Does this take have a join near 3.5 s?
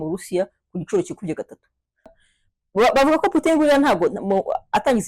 no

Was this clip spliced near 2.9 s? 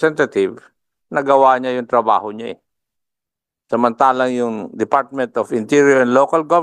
no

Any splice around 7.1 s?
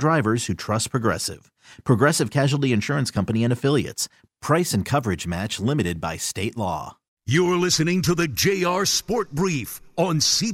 yes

